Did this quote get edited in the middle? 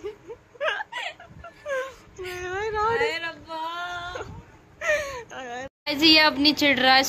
no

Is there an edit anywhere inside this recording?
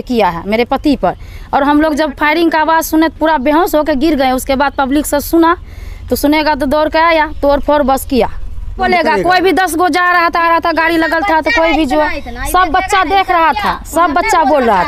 yes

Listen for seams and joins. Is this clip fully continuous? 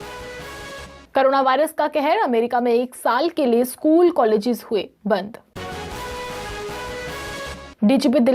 no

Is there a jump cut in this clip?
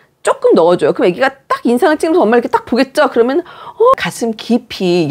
yes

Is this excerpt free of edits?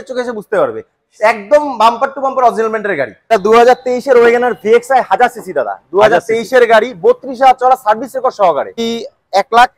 no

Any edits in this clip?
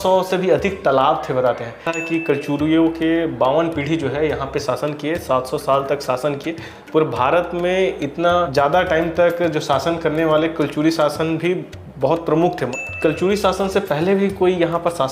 yes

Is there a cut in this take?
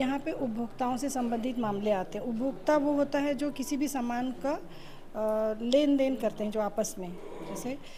no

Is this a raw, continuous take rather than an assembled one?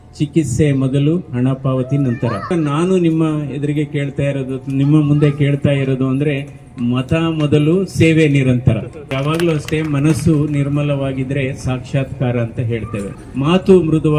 no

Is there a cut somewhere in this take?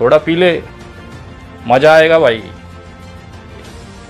no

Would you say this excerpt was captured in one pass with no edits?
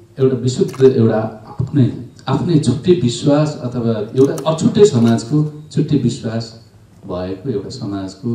yes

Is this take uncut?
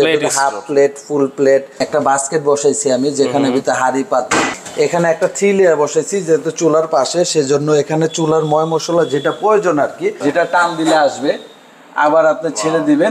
no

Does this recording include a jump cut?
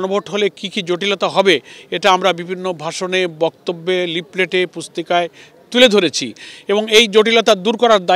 no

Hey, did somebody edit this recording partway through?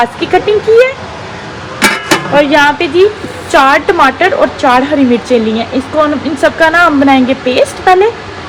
no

